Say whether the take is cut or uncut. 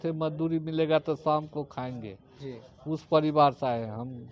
uncut